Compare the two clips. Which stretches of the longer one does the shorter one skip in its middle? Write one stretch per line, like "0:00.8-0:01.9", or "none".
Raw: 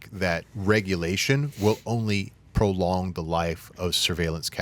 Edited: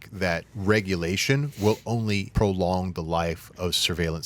0:02.3-0:02.5

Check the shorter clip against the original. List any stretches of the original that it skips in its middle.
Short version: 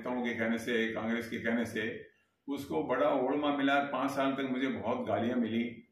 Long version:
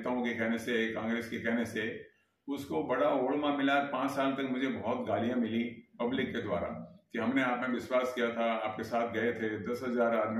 none

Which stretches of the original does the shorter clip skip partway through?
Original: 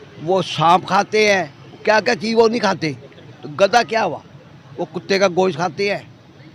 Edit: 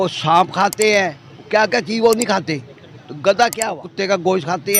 0:04.2-0:05.0

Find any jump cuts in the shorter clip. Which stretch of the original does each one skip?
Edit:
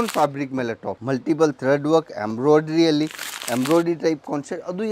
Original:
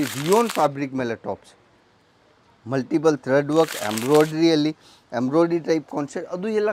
0:01.3-0:02.6

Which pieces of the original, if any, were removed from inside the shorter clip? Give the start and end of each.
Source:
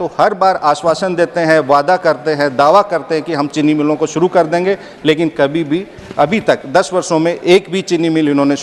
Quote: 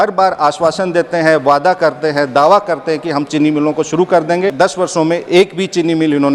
0:04.8-0:06.7

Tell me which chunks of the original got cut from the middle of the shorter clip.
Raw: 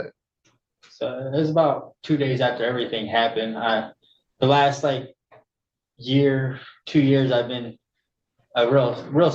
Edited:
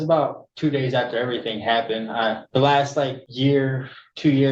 0:03.9-0:04.3
0:05.1-0:05.9

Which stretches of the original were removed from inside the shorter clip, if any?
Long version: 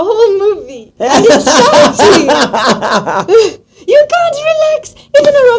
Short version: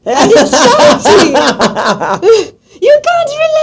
0:02.5-0:02.6

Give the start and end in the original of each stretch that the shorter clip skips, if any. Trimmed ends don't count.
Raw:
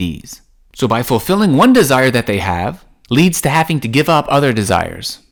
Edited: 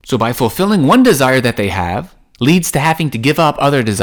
none

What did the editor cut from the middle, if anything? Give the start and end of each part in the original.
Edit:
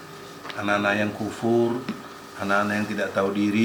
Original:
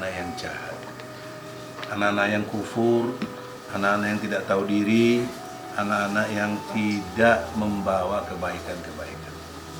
none

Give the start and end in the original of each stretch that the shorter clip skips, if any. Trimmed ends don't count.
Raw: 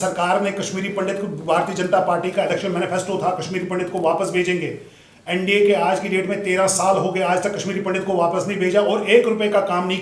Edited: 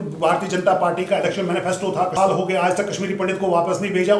0:03.4-0:06.8

